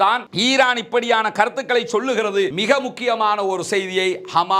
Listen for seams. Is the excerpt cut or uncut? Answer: cut